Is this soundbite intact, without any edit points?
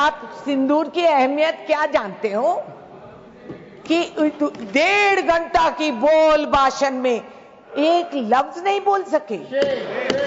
yes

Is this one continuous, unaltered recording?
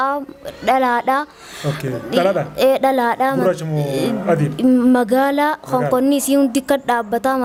yes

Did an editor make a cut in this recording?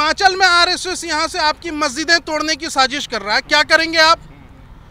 no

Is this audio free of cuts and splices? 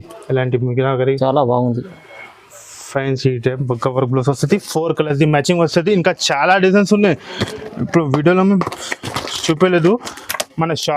yes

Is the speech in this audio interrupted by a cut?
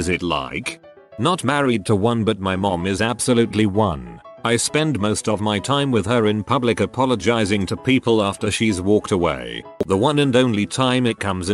yes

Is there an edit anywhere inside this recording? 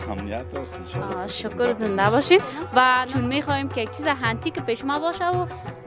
yes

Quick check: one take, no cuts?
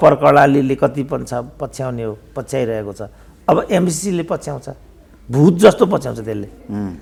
yes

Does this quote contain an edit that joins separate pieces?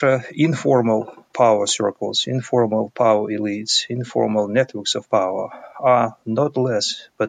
no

